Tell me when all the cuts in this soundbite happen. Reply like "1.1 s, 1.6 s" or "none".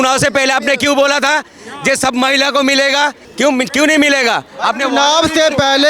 none